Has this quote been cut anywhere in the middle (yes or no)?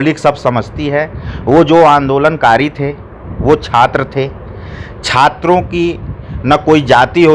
no